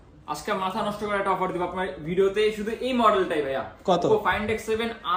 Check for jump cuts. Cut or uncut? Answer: uncut